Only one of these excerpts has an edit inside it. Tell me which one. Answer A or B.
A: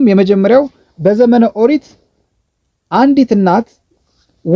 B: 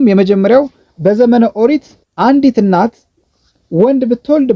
B